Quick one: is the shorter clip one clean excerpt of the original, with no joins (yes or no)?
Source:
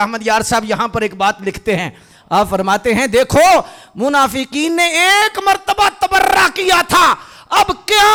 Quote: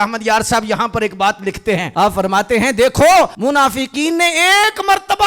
no